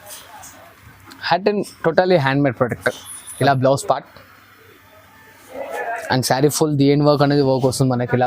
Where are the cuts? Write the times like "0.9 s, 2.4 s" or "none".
none